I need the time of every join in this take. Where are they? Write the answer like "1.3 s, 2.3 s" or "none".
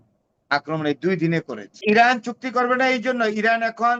1.8 s